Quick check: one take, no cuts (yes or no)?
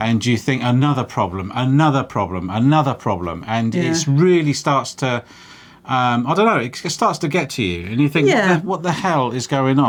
yes